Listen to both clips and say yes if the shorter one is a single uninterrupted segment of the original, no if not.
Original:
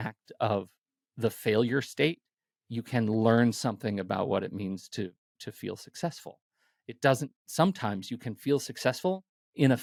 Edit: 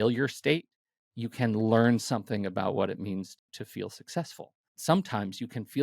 no